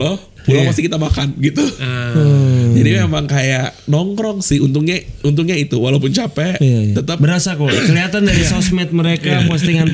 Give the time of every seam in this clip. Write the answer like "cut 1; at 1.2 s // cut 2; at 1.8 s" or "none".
none